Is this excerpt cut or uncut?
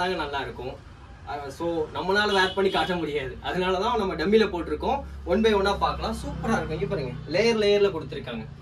uncut